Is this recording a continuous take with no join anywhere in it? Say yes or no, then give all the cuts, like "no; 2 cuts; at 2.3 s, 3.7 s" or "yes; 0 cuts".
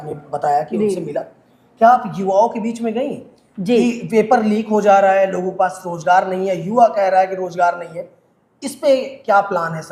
yes; 0 cuts